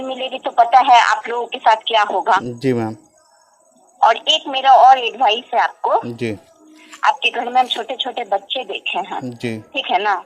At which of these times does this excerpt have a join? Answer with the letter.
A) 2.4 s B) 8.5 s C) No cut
C